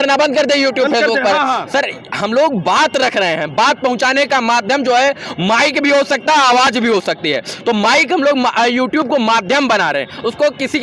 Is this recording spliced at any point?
no; 0 cuts

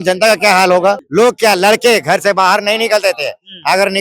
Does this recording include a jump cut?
yes; 1 cut; at 1.0 s

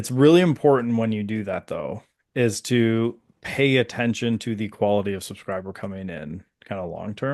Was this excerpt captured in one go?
yes; 0 cuts

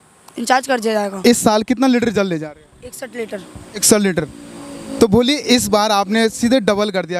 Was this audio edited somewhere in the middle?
yes; 1 cut; at 1.1 s

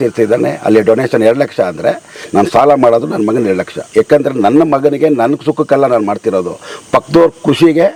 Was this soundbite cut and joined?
no; 0 cuts

